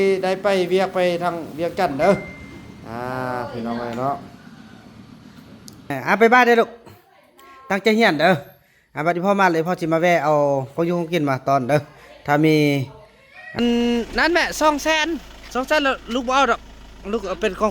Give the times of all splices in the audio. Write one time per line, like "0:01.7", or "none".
0:05.9
0:13.6